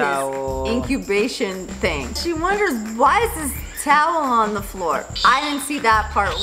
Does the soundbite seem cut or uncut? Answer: cut